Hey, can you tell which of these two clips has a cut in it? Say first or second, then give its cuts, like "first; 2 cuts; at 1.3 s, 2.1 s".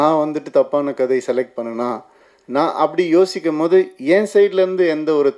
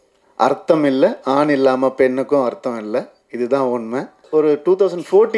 second; 1 cut; at 4.2 s